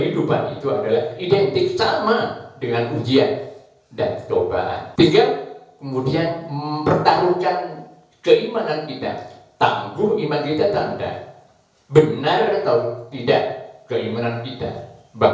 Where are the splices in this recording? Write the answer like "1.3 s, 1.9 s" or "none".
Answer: 4.9 s